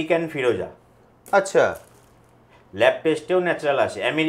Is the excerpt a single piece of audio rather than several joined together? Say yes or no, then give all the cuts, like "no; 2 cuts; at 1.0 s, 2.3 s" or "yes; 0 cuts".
yes; 0 cuts